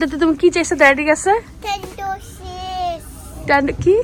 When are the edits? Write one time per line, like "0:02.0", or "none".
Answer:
none